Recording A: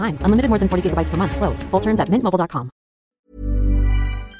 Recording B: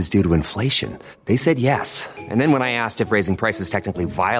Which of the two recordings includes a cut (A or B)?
A